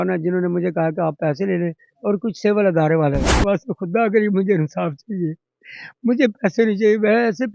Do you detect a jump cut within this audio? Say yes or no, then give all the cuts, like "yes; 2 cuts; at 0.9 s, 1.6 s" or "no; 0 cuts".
yes; 1 cut; at 3.4 s